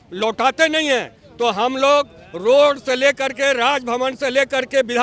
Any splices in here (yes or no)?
no